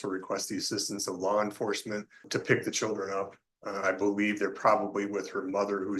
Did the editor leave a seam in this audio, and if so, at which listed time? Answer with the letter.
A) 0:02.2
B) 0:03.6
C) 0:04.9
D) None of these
A